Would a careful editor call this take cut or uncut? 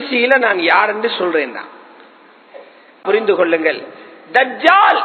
cut